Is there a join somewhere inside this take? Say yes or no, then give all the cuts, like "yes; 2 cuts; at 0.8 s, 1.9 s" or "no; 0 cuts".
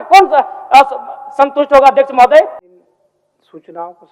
yes; 1 cut; at 2.6 s